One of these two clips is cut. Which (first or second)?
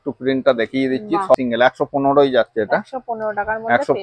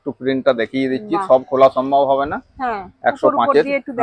first